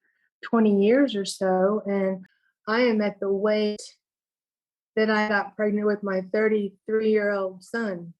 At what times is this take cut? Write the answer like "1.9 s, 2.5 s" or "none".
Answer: 2.3 s